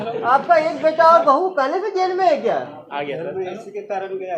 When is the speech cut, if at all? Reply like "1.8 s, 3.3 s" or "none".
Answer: none